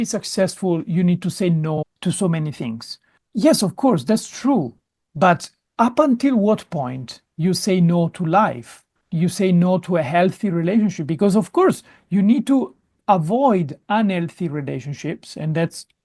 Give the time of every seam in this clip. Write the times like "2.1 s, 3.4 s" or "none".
none